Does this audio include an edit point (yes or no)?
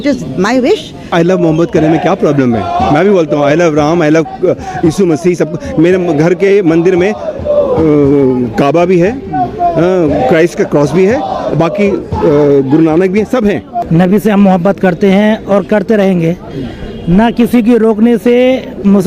yes